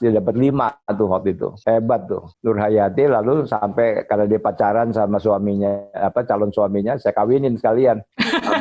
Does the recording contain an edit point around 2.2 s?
yes; 2 cuts; at 1.5 s, 2.2 s

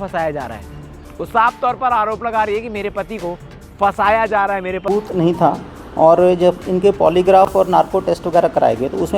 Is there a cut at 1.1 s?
no; 1 cut; at 4.9 s

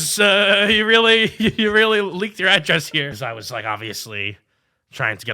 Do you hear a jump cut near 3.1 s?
yes; 1 cut; at 3.1 s

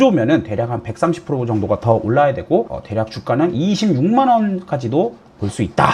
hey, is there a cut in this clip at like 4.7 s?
no; 0 cuts

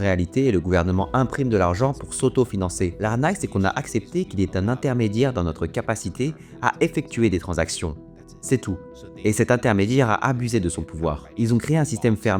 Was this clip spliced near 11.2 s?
yes; 2 cuts; at 2.9 s, 11.2 s

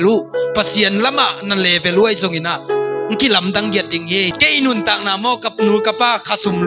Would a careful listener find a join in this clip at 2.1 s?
no; 1 cut; at 4.3 s

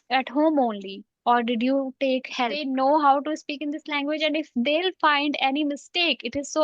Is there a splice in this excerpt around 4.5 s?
no; 1 cut; at 2.6 s

